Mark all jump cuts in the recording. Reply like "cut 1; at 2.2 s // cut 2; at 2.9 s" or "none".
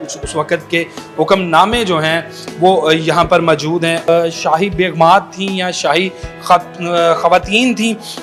cut 1; at 4.1 s